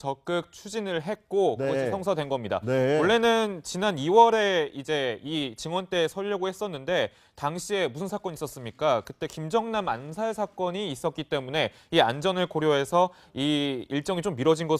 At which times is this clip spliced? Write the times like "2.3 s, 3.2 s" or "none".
none